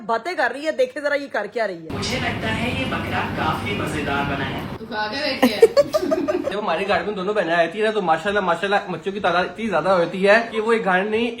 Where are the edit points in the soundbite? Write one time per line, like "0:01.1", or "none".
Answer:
0:06.5
0:10.5